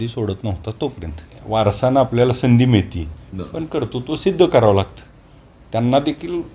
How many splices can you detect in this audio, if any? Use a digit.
1